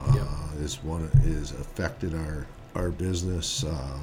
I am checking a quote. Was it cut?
yes; 1 cut; at 2.6 s

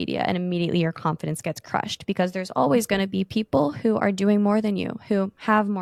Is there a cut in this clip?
no; 0 cuts

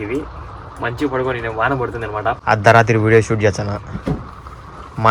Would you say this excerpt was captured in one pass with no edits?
no; 1 cut; at 2.4 s

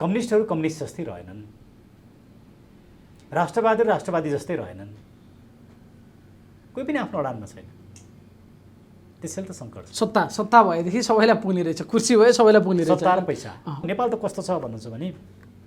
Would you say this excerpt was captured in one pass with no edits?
no; 1 cut; at 13.8 s

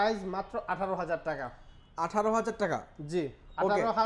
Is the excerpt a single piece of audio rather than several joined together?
yes; 0 cuts

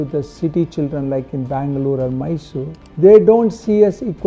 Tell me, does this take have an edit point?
yes; 1 cut; at 2.8 s

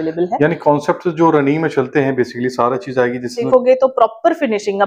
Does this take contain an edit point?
yes; 1 cut; at 3.4 s

